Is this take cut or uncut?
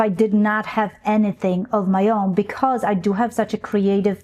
uncut